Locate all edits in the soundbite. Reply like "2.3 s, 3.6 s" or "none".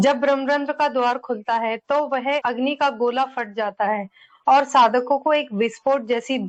none